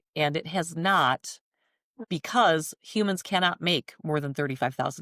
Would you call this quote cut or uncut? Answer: uncut